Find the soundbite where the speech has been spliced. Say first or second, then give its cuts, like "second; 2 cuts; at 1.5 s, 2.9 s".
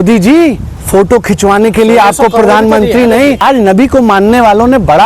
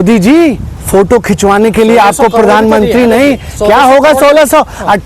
first; 1 cut; at 3.4 s